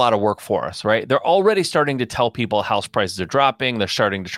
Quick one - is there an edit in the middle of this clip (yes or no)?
no